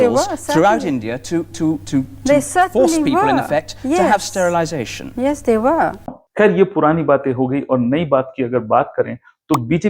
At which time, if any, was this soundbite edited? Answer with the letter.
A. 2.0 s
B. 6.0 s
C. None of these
C